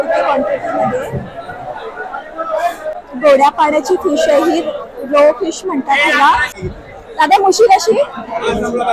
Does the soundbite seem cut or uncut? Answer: cut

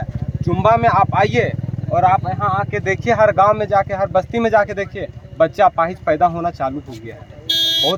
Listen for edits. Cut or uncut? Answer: uncut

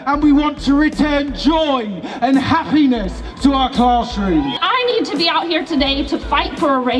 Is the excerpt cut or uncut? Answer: cut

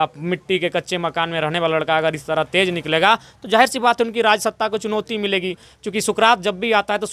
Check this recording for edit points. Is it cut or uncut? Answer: uncut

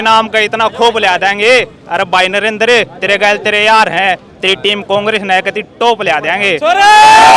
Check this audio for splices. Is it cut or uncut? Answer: uncut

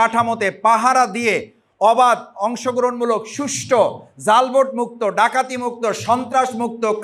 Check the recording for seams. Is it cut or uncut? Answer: uncut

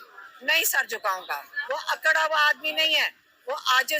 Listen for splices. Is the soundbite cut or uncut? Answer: cut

